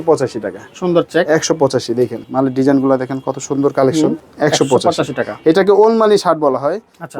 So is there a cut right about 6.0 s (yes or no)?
no